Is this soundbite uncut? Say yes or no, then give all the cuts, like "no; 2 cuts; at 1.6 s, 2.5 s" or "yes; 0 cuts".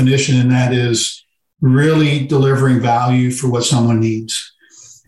yes; 0 cuts